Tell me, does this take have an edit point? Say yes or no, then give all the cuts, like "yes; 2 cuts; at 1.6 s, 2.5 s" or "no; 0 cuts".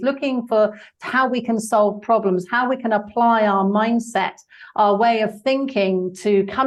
no; 0 cuts